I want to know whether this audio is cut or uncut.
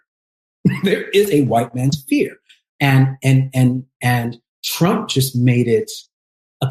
uncut